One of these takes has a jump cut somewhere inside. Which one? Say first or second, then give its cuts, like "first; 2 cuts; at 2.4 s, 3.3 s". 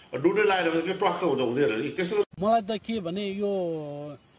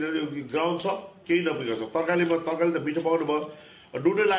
first; 1 cut; at 2.3 s